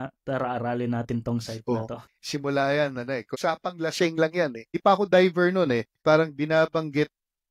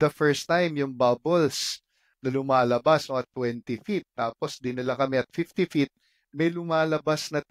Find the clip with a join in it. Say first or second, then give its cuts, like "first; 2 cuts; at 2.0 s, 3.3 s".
first; 4 cuts; at 1.7 s, 3.3 s, 4.7 s, 5.9 s